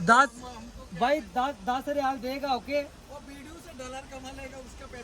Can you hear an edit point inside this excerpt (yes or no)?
no